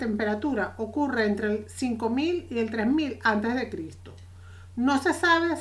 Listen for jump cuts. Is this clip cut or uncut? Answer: cut